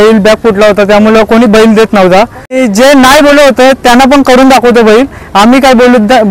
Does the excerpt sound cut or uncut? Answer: cut